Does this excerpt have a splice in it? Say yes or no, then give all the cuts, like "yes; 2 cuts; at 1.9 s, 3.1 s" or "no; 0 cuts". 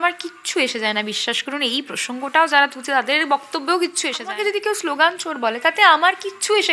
yes; 1 cut; at 4.3 s